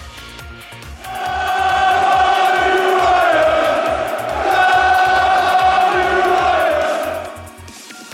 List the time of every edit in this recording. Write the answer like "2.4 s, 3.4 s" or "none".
1.1 s, 7.2 s